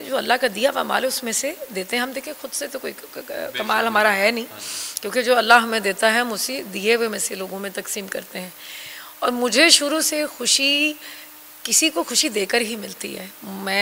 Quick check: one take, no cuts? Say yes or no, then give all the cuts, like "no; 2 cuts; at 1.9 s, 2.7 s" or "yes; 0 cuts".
yes; 0 cuts